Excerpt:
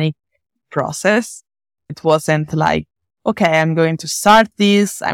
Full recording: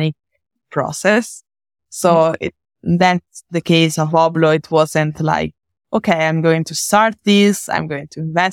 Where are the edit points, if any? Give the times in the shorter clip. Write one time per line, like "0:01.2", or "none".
0:02.0